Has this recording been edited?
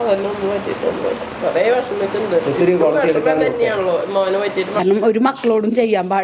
yes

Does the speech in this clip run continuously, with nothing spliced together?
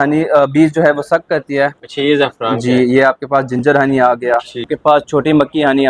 no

